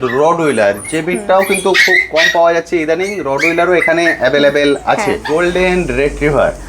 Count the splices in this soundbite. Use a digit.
1